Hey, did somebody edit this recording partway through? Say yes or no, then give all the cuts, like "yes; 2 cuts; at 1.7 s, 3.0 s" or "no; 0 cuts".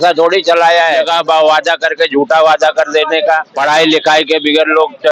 yes; 2 cuts; at 1.0 s, 3.5 s